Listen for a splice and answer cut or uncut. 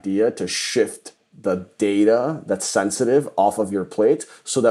uncut